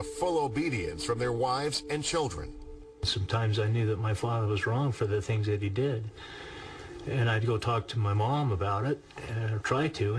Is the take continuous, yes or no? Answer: yes